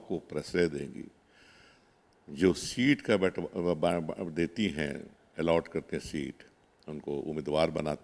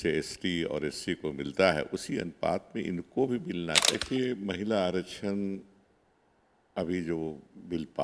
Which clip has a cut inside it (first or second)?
second